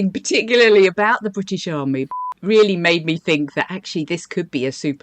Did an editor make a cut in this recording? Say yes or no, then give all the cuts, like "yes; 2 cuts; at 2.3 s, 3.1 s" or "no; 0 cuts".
yes; 1 cut; at 2.2 s